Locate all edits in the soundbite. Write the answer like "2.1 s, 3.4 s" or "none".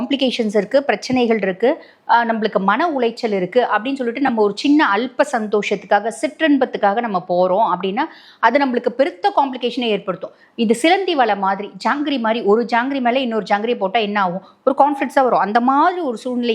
none